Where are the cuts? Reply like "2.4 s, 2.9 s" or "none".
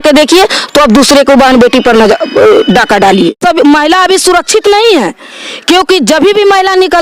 3.4 s